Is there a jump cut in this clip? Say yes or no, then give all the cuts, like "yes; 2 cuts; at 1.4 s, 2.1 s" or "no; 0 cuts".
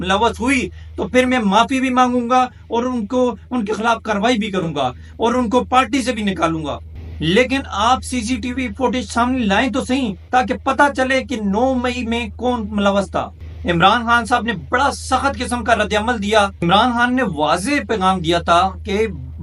no; 0 cuts